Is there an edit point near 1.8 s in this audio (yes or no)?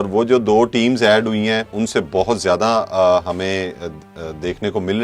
yes